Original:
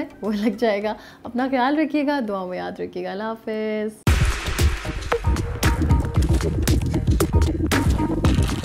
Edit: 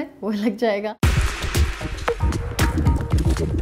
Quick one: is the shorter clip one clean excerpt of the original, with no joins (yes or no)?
no